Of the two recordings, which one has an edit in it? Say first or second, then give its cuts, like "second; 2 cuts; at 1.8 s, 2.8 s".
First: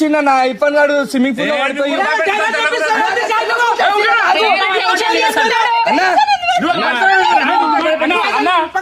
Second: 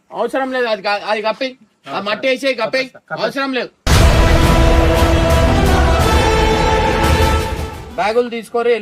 second; 1 cut; at 7.8 s